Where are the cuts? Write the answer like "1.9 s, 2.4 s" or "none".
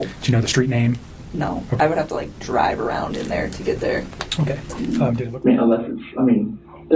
4.8 s